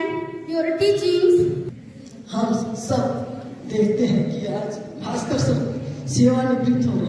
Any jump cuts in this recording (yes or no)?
yes